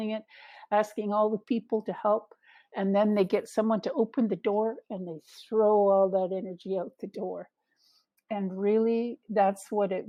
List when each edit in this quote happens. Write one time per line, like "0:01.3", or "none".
none

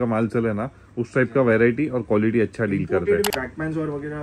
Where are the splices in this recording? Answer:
0:03.3

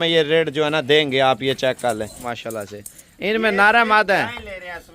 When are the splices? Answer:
0:02.3

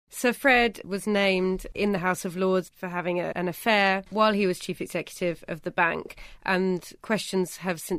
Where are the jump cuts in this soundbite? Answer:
0:00.8
0:01.7
0:03.9
0:06.9

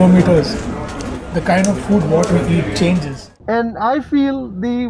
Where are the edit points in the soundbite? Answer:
0:03.4

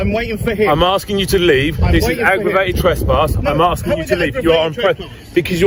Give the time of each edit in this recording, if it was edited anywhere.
none

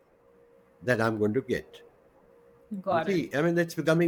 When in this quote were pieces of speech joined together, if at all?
none

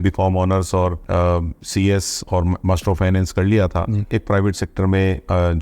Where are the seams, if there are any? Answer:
0:01.0
0:04.1

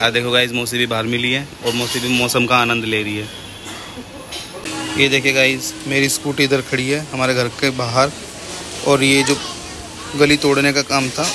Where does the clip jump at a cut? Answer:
0:04.6

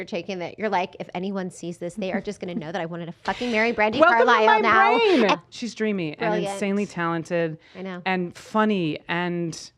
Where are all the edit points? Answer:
0:05.3

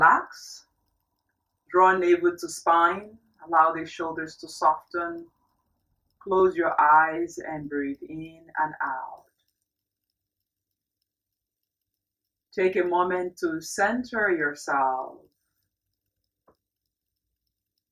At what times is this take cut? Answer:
none

